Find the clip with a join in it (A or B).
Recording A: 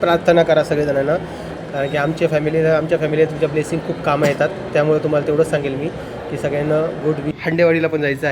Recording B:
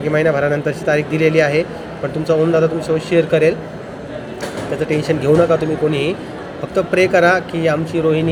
A